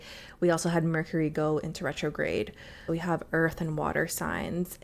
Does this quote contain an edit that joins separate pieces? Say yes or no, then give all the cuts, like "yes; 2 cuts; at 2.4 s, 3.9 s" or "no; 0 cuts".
yes; 1 cut; at 2.8 s